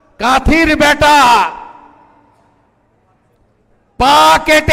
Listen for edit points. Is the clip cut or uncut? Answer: uncut